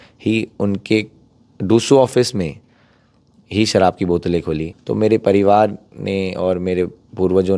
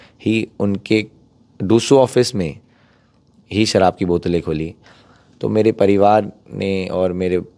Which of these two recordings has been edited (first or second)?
first